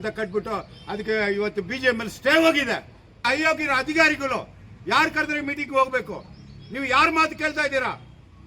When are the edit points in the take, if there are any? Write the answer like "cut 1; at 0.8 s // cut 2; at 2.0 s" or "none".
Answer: cut 1; at 3.2 s